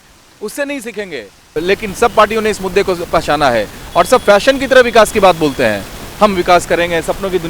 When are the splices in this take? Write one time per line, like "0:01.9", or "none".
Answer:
0:01.5